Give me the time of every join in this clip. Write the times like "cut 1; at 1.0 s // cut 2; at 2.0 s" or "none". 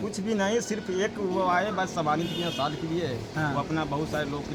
none

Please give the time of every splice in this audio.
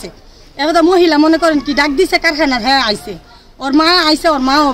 none

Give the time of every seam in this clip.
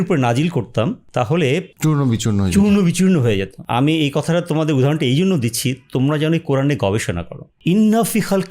none

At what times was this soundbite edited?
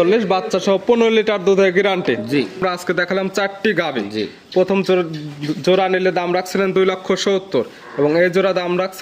cut 1; at 2.6 s

